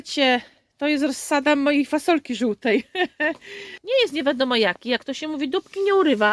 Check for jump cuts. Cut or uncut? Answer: cut